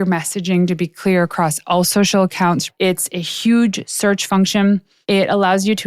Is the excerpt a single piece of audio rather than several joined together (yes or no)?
no